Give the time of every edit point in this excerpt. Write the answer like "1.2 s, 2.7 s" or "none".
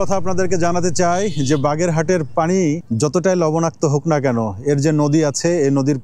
2.9 s